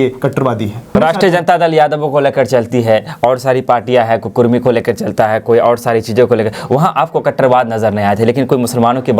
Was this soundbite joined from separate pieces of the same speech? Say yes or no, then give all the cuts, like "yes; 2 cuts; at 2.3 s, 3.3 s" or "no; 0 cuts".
yes; 1 cut; at 0.9 s